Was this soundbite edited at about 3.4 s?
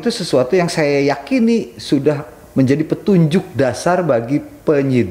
no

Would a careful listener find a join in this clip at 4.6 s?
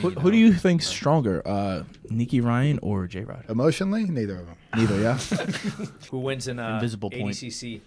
no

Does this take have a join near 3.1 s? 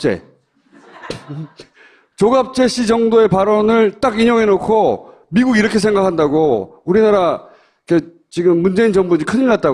yes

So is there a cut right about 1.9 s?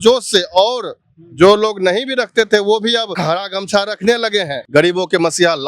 no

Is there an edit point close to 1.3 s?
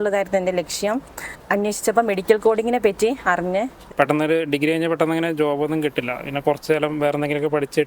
yes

